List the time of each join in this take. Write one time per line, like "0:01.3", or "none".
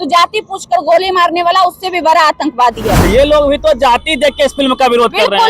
0:03.0